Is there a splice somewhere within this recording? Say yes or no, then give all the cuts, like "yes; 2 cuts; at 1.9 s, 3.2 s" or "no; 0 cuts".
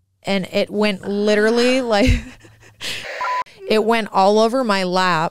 yes; 1 cut; at 3.4 s